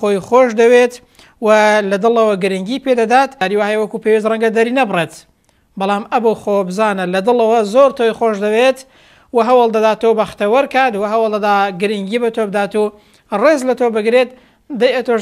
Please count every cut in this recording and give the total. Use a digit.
1